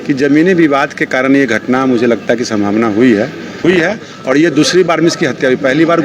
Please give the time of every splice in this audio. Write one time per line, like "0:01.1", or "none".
0:03.5

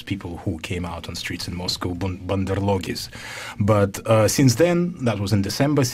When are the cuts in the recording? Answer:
0:03.4

